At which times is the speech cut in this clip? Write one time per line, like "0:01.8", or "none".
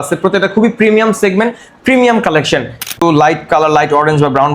0:03.0